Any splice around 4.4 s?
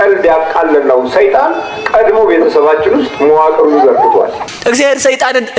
yes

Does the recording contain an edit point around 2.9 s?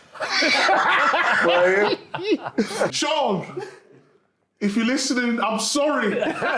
yes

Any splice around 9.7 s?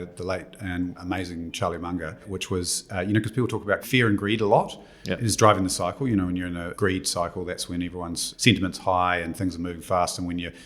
no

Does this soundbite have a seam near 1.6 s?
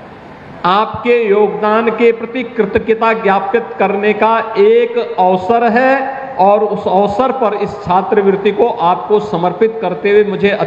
no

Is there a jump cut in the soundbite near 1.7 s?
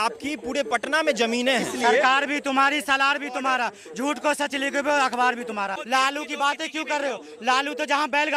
yes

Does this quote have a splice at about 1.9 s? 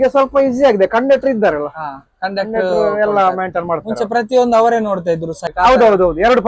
no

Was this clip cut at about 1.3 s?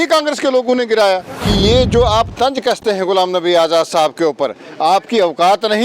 yes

